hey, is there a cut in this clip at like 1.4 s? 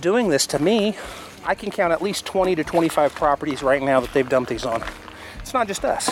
yes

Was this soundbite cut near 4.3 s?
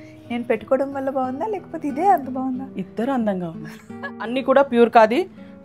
yes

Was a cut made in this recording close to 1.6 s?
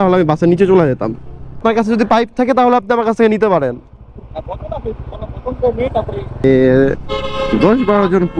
yes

